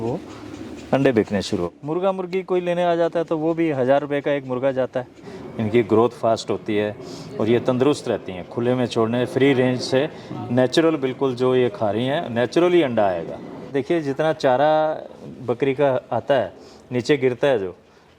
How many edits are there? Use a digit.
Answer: 3